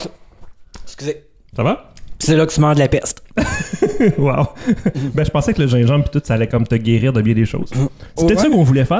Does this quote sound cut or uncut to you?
uncut